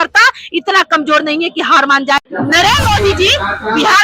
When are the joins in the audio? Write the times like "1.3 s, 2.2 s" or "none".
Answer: 2.2 s